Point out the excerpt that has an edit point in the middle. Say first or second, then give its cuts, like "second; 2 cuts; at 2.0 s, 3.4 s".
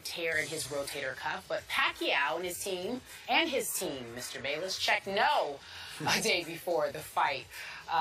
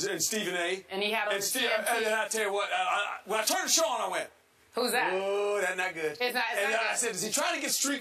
first; 1 cut; at 4.7 s